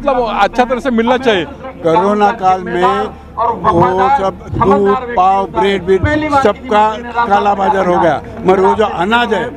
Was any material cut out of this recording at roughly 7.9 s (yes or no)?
no